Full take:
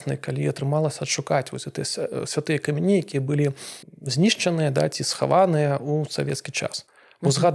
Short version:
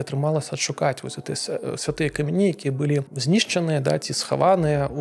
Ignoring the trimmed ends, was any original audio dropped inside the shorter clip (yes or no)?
yes